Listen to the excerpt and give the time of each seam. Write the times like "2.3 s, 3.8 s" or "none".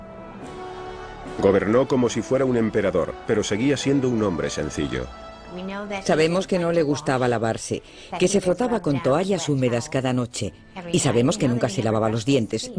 9.5 s